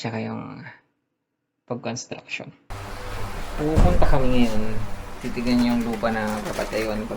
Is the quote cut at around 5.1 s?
no; 1 cut; at 2.7 s

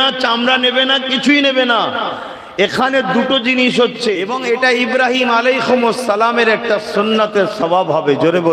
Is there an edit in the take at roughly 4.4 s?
yes; 1 cut; at 4.4 s

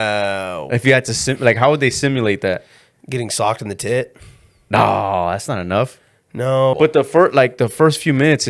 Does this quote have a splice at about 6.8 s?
yes; 1 cut; at 6.8 s

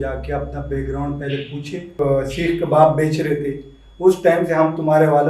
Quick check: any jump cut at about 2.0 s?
yes; 1 cut; at 2.0 s

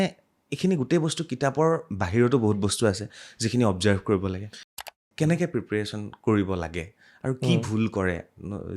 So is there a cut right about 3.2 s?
no; 1 cut; at 4.8 s

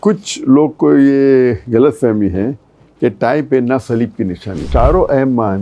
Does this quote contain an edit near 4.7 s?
yes; 1 cut; at 4.7 s

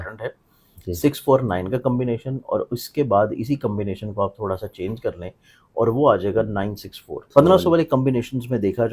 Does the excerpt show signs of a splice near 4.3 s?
no; 1 cut; at 7.2 s

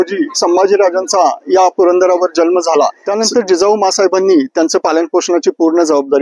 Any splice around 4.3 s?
no; 1 cut; at 3.0 s

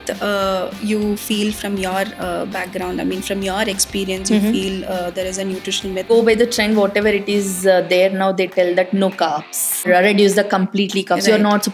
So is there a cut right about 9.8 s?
yes; 2 cuts; at 6.1 s, 9.8 s

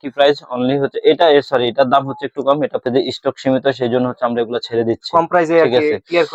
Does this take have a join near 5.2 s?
no; 1 cut; at 2.8 s

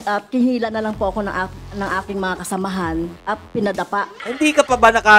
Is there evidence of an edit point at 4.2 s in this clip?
yes; 2 cuts; at 3.3 s, 4.2 s

